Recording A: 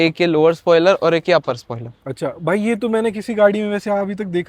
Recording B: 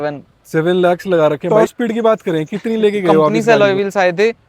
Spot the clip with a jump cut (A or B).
B